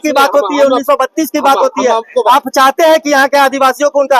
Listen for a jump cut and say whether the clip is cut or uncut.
uncut